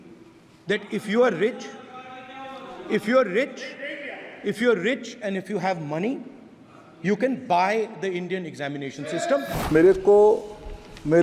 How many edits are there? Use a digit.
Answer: 1